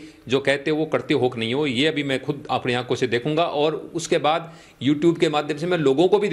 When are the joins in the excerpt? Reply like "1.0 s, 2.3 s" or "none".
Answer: none